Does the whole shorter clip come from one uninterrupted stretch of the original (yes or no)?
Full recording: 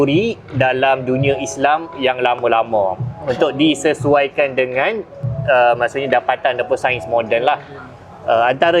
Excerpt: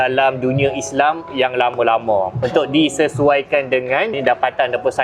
no